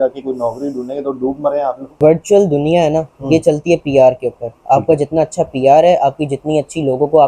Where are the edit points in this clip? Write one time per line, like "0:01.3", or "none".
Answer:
0:01.9